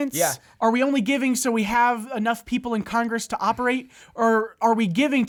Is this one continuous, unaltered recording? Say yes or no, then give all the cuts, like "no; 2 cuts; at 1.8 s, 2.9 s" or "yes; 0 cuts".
yes; 0 cuts